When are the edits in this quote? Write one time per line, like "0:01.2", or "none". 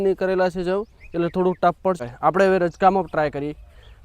0:02.0